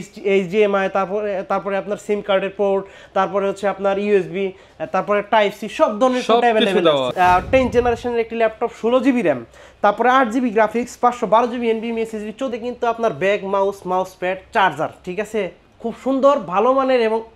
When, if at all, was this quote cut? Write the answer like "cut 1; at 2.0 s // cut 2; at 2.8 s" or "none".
cut 1; at 7.1 s // cut 2; at 12.5 s